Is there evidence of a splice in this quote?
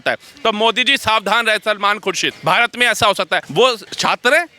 yes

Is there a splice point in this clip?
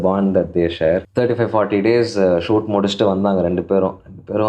yes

